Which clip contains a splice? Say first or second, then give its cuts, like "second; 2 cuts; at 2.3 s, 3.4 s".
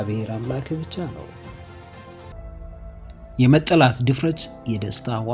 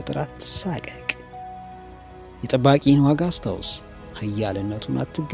first; 1 cut; at 2.3 s